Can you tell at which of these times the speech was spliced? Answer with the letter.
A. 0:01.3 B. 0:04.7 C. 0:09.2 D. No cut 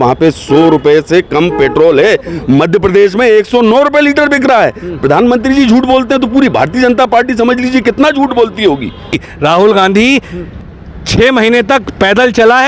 C